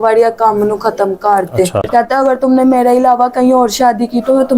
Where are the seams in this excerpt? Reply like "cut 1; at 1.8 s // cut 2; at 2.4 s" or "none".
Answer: cut 1; at 1.9 s